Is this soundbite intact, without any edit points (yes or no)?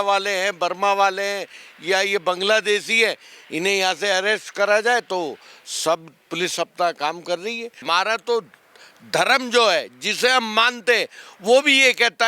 no